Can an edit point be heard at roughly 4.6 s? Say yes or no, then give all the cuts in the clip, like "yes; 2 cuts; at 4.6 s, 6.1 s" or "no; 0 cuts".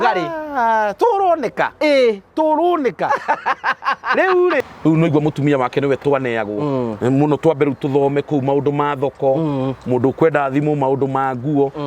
yes; 1 cut; at 4.6 s